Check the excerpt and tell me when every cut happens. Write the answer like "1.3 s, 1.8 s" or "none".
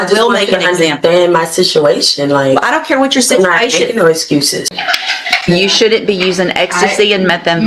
4.7 s